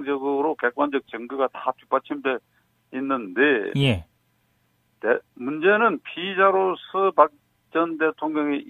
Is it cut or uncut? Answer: cut